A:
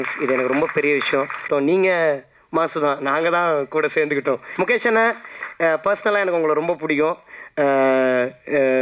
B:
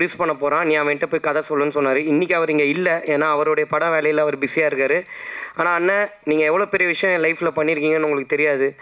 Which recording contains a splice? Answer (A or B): A